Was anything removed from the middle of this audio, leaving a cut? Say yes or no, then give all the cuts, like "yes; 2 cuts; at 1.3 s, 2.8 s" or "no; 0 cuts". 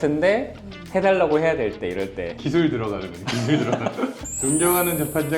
yes; 1 cut; at 4.3 s